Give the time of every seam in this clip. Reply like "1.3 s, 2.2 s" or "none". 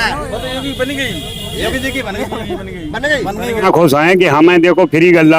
3.6 s